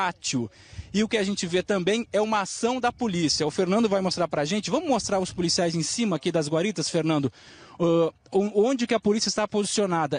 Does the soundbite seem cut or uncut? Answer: uncut